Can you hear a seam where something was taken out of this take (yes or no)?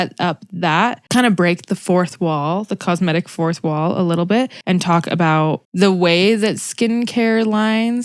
yes